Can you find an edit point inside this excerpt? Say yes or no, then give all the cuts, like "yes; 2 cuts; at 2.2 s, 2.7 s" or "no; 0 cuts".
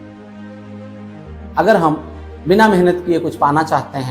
yes; 1 cut; at 1.5 s